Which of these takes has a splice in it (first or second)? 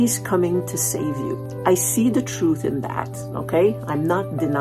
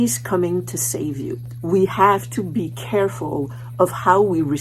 second